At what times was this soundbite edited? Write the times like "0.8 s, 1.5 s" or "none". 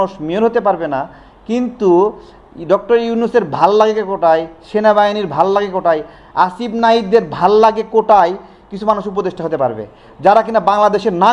none